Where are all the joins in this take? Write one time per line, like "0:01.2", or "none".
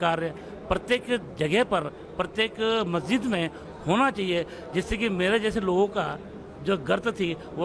none